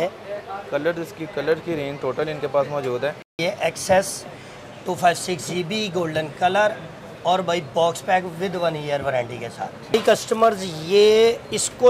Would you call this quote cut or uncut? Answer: cut